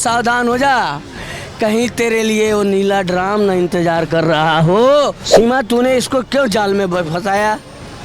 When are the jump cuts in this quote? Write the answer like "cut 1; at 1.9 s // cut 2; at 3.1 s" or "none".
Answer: cut 1; at 5.2 s